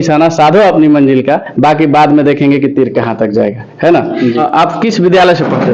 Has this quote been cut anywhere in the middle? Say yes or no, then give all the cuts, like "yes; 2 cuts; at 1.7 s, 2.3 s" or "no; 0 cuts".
yes; 1 cut; at 4.4 s